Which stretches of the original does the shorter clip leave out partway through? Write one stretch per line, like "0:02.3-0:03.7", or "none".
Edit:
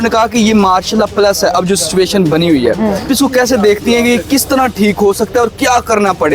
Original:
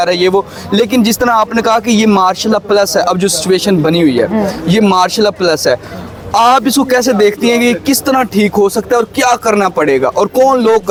0:04.6-0:06.6